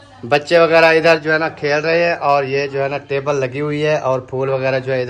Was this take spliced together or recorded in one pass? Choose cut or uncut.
uncut